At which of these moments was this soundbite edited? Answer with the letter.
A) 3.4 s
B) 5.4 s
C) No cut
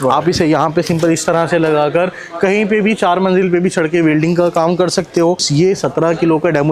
B